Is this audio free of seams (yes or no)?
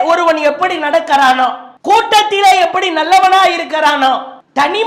yes